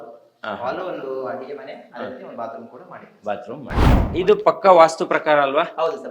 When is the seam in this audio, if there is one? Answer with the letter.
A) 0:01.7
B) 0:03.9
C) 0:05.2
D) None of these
B